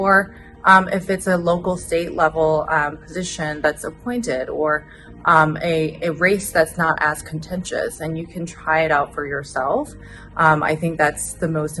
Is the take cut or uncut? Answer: uncut